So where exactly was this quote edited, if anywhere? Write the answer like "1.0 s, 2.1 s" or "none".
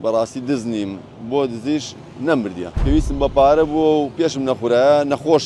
2.7 s